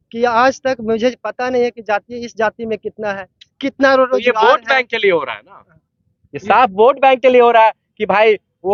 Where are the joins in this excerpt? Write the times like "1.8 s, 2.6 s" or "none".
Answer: none